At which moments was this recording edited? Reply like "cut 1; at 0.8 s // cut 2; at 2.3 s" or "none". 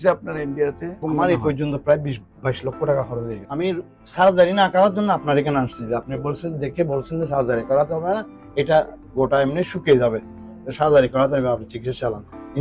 cut 1; at 1.0 s // cut 2; at 3.4 s

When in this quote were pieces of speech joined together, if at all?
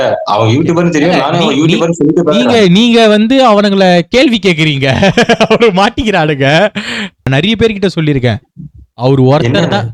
cut 1; at 7.3 s

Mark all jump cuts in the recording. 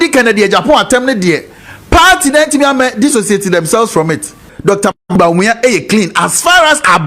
cut 1; at 4.5 s

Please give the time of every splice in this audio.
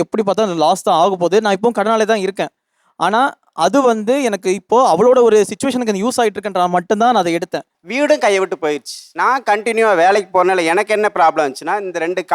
cut 1; at 7.7 s

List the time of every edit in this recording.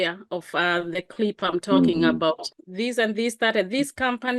cut 1; at 2.4 s

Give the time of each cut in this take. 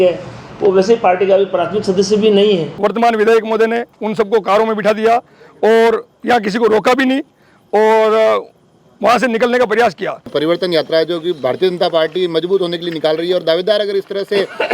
cut 1; at 2.7 s // cut 2; at 10.3 s

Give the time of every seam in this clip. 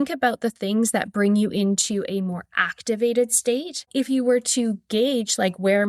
cut 1; at 3.9 s

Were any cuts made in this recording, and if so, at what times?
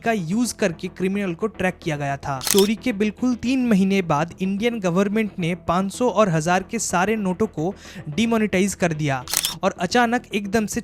cut 1; at 2.5 s // cut 2; at 9.4 s

